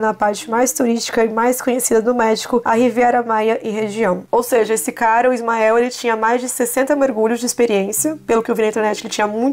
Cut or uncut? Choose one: cut